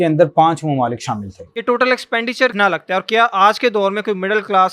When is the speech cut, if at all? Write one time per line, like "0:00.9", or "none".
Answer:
0:01.4
0:02.5